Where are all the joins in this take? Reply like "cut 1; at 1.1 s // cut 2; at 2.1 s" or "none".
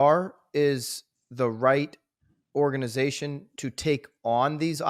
none